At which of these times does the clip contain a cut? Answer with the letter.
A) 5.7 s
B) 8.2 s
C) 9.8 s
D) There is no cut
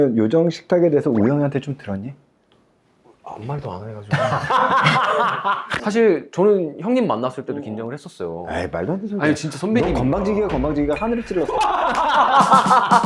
A